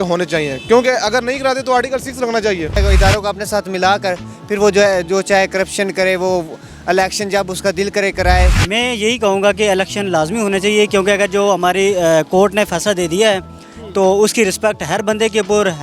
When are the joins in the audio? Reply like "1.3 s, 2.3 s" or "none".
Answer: 2.8 s, 8.6 s